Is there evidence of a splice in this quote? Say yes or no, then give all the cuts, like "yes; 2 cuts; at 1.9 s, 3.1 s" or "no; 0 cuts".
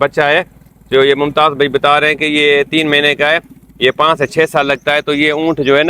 no; 0 cuts